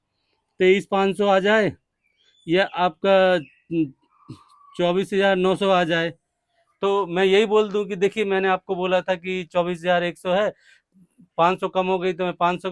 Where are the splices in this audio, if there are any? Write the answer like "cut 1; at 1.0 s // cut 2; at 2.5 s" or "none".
none